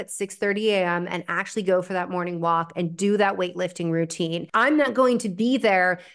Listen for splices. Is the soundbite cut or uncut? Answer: cut